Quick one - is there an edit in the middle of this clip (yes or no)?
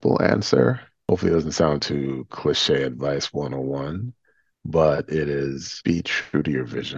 yes